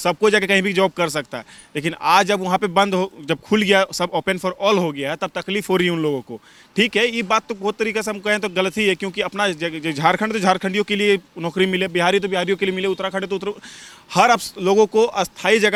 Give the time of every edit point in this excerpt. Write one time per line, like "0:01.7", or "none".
none

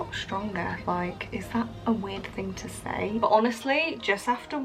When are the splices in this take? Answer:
0:03.2

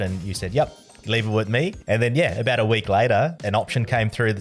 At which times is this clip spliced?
0:01.8
0:03.4

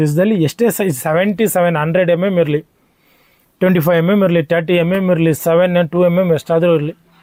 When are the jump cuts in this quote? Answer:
none

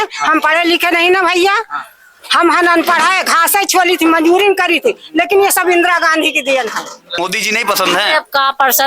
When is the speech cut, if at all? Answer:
0:07.2

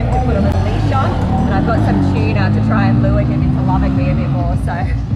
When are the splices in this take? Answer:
none

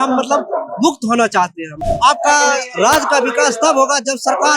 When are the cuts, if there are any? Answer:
0:01.7

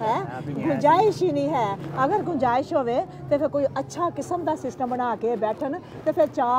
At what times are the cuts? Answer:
none

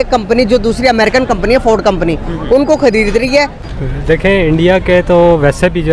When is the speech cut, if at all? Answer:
0:03.6

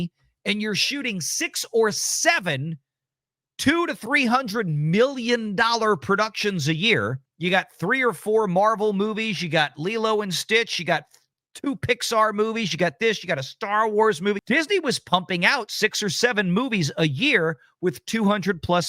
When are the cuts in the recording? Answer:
0:07.2
0:14.4

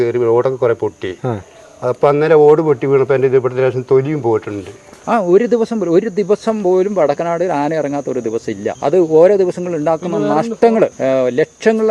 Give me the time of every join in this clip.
0:05.0
0:08.8
0:11.0

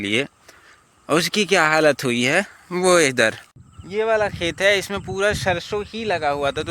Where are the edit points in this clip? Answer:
0:03.5

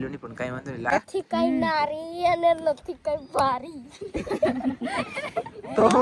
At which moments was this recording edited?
0:00.9

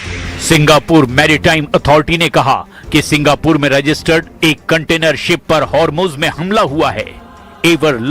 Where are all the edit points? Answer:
0:03.6

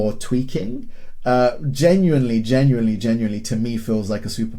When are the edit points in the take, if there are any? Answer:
none

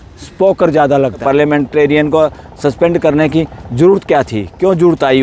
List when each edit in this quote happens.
0:01.2

